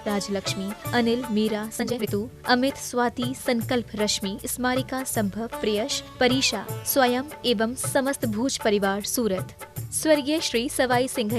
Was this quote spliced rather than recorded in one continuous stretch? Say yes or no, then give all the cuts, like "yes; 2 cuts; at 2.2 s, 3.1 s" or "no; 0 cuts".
yes; 1 cut; at 1.8 s